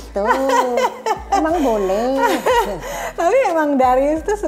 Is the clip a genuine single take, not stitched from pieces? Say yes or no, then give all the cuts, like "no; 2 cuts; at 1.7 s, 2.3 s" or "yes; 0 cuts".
yes; 0 cuts